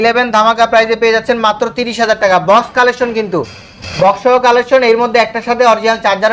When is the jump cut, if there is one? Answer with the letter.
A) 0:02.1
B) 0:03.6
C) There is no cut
C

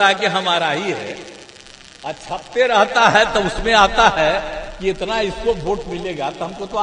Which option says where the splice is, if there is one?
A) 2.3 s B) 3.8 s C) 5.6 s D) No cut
D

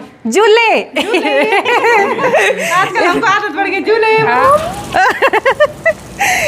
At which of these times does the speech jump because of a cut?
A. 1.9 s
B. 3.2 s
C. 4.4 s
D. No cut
C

